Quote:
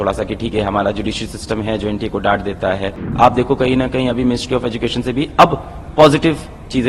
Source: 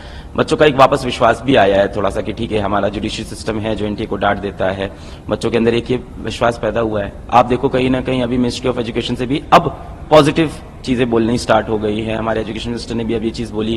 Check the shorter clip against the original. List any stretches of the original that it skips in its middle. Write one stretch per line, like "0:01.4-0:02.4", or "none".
0:05.0-0:07.2

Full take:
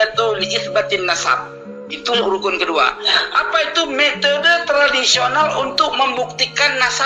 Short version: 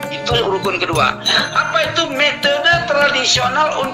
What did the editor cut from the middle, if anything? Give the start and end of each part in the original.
none

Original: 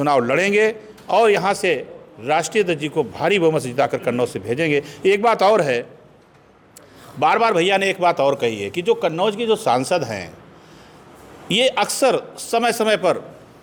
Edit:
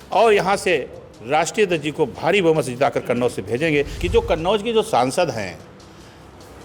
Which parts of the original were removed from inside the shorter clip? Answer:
0:04.9-0:08.7

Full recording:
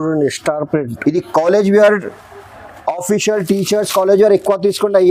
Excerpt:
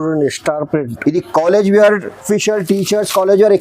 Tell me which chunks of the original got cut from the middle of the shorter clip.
0:02.2-0:03.0

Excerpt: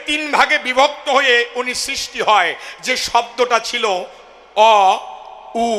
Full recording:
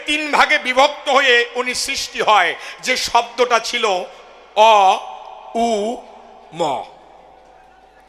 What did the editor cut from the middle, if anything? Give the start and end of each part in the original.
none

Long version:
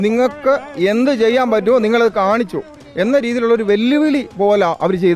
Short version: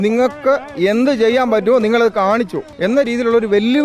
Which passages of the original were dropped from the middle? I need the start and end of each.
0:02.6-0:02.8

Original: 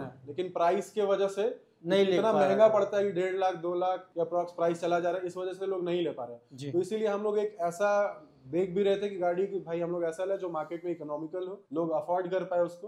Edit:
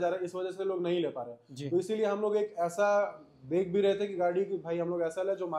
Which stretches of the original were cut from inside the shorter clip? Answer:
none

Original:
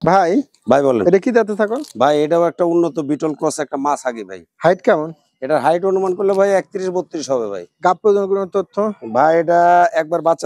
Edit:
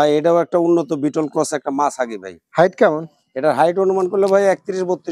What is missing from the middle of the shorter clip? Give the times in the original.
none

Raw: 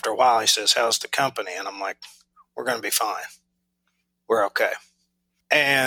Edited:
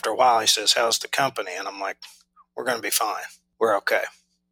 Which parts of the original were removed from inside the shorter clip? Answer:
0:03.4-0:04.1

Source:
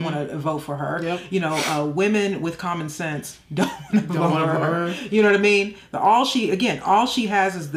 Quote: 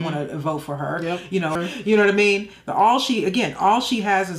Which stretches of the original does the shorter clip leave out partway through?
0:01.6-0:04.8

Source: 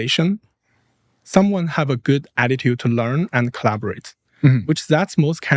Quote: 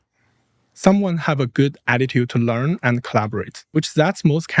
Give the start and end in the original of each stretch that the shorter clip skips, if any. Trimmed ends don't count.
0:04.2-0:04.6

